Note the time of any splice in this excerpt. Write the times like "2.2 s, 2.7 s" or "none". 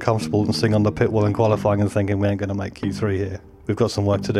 3.4 s